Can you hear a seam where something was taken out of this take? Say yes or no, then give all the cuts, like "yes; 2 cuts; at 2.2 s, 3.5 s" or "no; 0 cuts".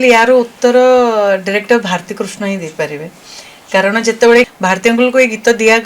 yes; 1 cut; at 4.5 s